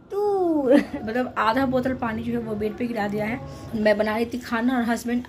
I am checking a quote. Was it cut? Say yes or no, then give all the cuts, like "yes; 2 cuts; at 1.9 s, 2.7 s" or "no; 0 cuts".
yes; 2 cuts; at 0.9 s, 3.6 s